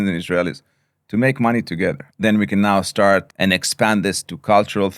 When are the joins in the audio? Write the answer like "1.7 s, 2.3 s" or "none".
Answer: 2.1 s, 3.3 s